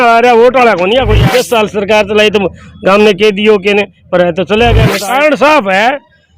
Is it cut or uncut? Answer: cut